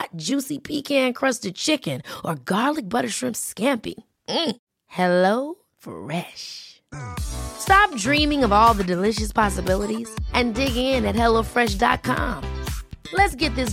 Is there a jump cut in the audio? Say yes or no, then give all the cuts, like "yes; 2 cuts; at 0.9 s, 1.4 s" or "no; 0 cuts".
no; 0 cuts